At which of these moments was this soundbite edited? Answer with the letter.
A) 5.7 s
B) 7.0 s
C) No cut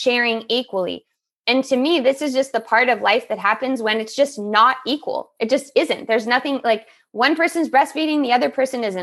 C